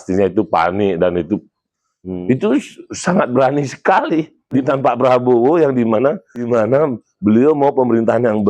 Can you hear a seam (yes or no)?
yes